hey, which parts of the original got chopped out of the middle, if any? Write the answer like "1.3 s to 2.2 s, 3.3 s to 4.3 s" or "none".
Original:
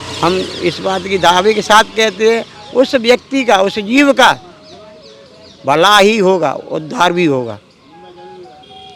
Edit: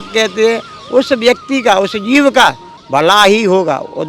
4.5 s to 5.5 s